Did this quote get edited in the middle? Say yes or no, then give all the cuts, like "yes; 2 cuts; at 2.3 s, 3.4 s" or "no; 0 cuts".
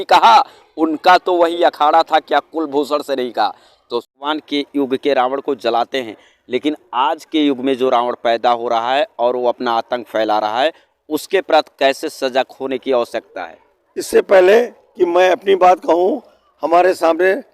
yes; 1 cut; at 4.2 s